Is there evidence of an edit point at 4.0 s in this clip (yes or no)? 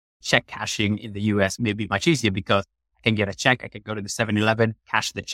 no